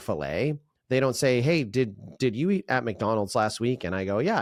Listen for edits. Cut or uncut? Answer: uncut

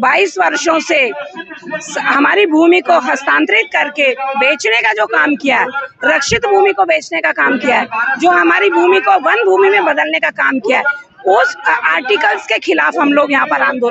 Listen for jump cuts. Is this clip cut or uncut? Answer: uncut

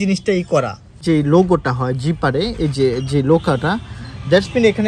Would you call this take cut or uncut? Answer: cut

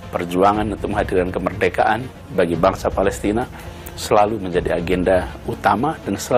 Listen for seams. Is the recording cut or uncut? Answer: uncut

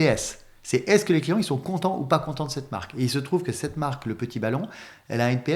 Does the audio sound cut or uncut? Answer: uncut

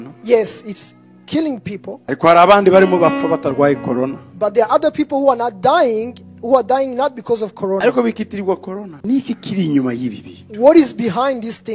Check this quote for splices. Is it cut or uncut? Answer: cut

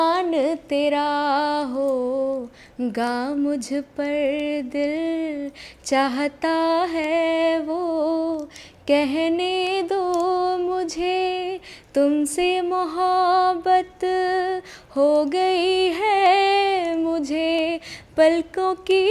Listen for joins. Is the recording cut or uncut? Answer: uncut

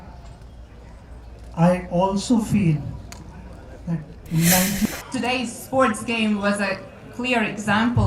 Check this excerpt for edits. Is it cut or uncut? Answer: cut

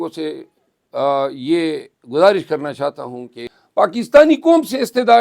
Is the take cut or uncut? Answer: cut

